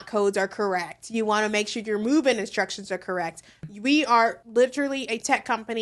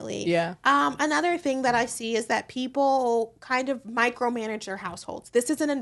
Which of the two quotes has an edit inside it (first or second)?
first